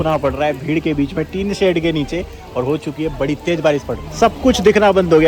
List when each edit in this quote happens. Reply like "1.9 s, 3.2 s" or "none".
4.1 s